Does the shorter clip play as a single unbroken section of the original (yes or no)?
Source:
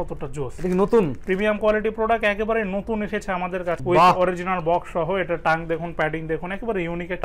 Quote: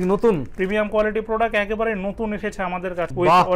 yes